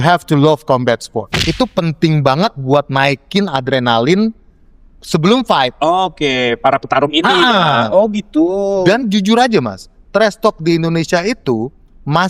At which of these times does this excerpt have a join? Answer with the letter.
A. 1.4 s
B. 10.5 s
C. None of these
A